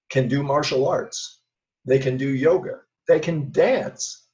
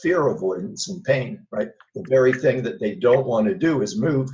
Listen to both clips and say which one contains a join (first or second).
first